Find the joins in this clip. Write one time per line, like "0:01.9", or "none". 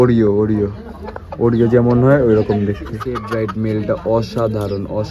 0:03.2